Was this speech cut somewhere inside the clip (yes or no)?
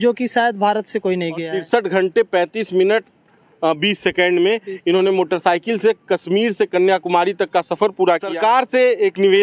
yes